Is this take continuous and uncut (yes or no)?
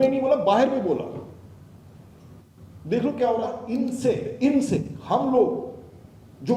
no